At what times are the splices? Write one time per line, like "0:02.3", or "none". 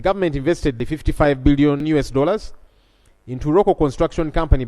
0:00.8
0:01.9